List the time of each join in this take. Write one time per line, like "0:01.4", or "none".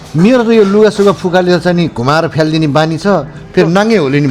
none